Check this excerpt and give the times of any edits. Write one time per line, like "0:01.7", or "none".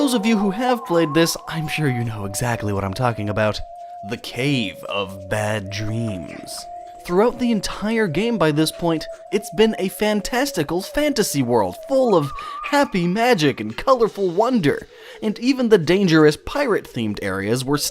0:09.1